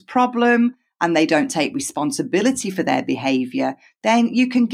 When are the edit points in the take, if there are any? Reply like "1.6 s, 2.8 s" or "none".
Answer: none